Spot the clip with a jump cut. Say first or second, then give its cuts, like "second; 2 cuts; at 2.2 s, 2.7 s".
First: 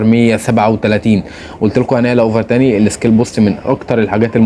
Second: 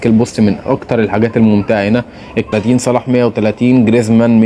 second; 1 cut; at 2.5 s